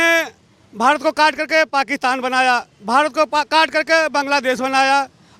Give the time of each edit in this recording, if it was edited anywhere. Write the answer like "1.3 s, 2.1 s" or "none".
none